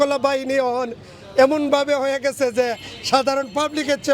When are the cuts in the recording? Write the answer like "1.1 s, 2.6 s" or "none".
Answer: none